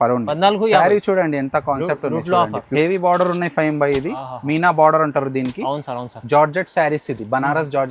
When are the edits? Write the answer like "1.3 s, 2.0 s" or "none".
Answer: 2.7 s